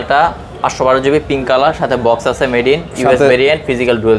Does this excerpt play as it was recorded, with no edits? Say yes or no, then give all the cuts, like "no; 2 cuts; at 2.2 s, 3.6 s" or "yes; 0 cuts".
yes; 0 cuts